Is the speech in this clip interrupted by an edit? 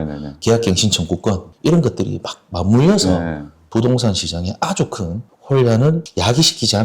yes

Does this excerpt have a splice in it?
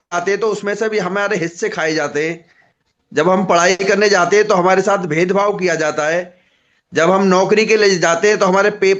no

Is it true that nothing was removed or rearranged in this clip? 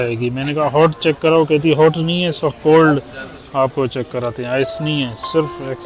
yes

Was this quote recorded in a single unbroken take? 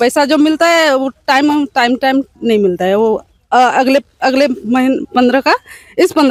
yes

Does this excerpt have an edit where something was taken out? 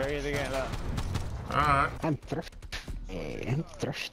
yes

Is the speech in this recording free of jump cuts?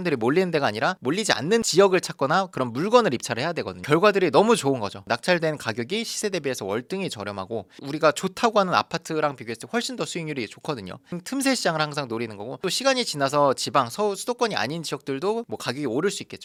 yes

